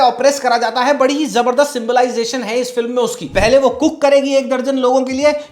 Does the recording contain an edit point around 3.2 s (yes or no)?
yes